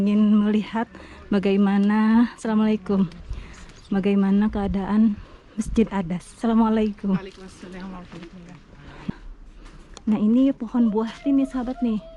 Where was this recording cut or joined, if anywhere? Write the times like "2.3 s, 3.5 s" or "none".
9.1 s